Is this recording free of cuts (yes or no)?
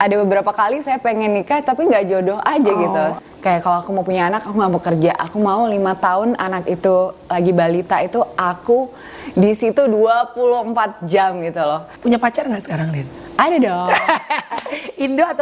no